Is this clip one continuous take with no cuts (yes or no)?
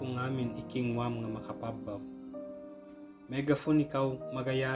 yes